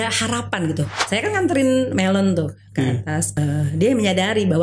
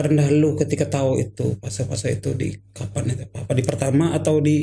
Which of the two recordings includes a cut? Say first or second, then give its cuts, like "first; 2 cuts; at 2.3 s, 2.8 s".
first; 2 cuts; at 1.0 s, 3.3 s